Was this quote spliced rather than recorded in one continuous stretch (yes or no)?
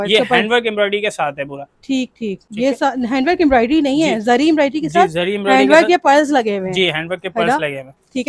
no